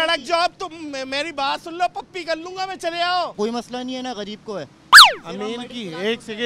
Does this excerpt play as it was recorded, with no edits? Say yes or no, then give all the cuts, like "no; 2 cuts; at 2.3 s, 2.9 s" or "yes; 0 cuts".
no; 1 cut; at 3.3 s